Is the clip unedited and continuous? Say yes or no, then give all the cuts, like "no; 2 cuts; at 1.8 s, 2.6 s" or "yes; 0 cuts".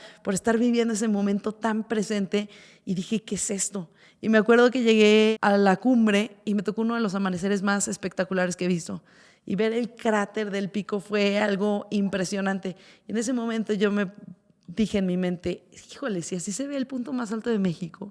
no; 1 cut; at 5.3 s